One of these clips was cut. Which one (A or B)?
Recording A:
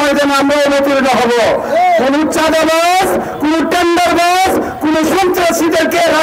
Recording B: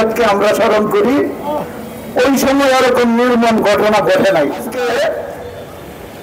B